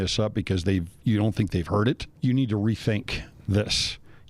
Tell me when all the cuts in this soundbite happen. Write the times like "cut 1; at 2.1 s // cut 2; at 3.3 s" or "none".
cut 1; at 2.1 s